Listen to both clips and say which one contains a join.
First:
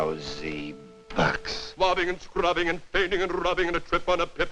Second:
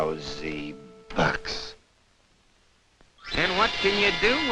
second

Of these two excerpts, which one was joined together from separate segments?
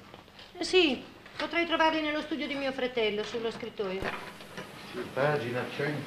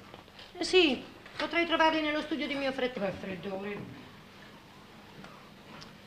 first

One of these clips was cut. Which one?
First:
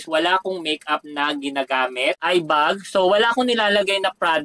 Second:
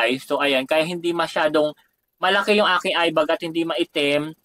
first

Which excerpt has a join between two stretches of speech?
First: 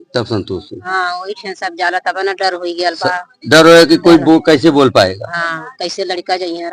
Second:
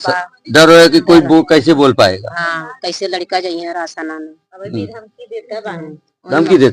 first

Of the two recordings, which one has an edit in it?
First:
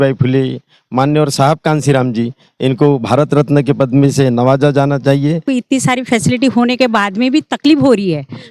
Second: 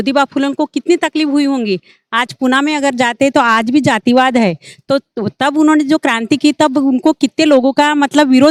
first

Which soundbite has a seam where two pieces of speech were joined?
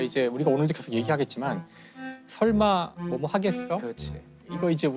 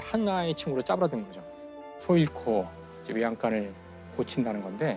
second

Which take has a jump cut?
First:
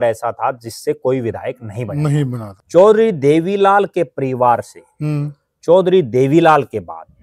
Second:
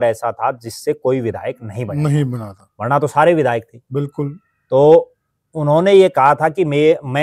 first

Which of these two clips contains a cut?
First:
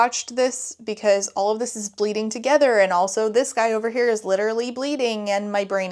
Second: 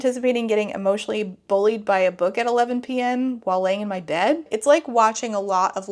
second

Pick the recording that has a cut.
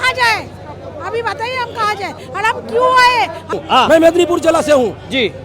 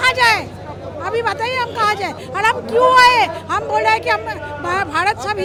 first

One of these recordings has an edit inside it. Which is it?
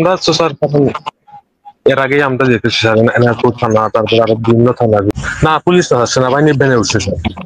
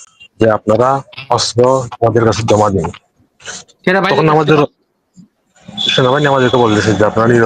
first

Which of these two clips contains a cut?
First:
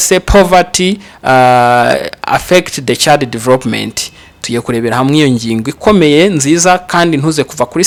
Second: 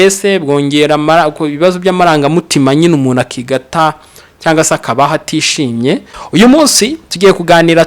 second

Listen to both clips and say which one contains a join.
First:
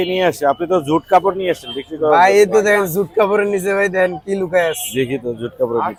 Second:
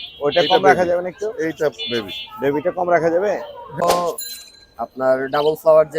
second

